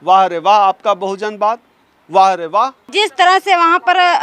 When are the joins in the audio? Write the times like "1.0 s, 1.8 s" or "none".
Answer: 2.9 s

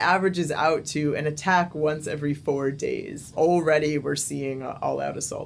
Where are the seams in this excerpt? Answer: 3.3 s

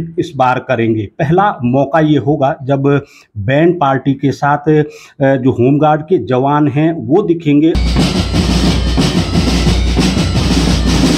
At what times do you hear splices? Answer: none

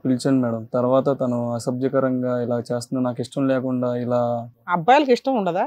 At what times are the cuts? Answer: 4.7 s

